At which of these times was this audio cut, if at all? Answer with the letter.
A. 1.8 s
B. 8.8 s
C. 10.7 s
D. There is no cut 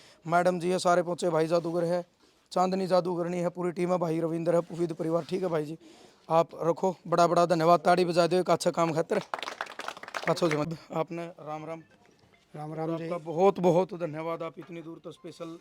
C